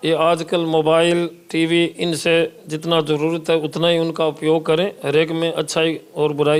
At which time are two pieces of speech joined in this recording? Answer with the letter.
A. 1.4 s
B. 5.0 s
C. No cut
C